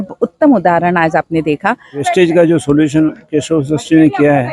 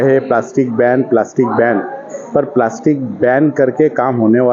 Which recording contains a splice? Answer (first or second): first